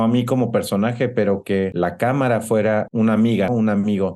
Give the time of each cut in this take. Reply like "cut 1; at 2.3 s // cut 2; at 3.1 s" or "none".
cut 1; at 1.7 s // cut 2; at 3.2 s

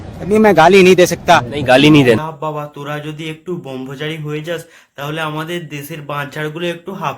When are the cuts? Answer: cut 1; at 2.3 s

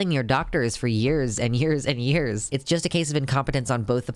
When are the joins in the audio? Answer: cut 1; at 2.4 s

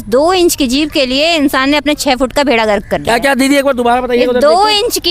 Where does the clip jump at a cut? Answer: none

